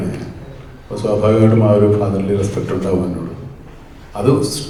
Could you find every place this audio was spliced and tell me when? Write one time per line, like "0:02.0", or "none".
none

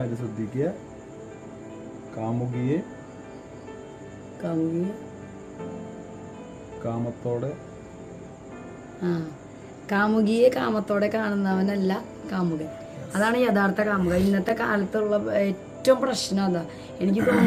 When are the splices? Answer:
none

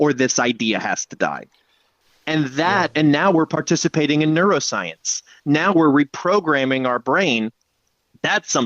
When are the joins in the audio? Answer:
0:02.0

